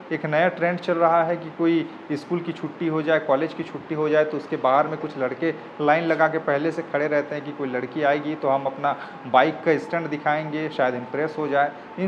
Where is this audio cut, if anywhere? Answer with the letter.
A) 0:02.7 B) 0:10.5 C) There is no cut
C